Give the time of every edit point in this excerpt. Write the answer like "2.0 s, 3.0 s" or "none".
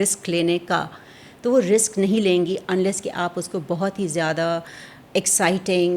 none

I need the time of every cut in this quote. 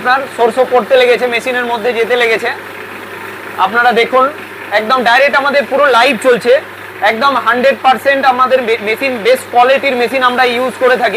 none

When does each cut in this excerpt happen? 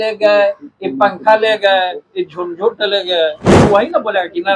3.6 s

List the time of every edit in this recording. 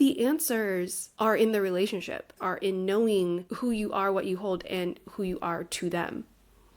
1.0 s, 2.4 s, 3.5 s

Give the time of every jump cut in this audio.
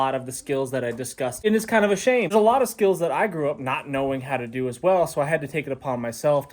1.4 s, 2.3 s

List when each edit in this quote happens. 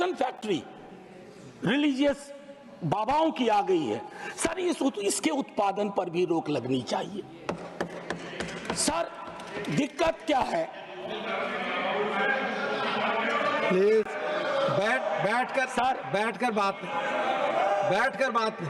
none

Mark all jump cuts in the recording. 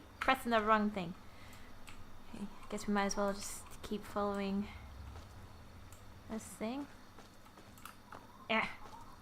8.1 s

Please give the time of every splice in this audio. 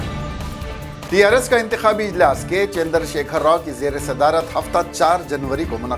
1.3 s

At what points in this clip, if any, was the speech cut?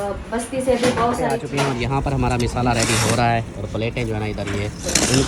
1.5 s

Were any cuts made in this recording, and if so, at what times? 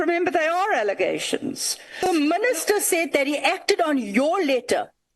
2.1 s

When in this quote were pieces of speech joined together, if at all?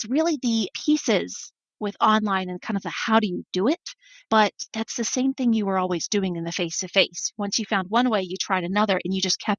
none

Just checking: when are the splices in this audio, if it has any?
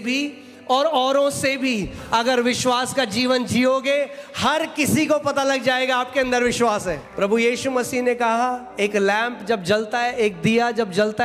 7.1 s

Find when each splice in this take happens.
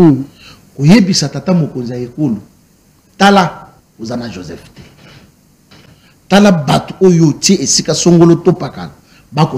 none

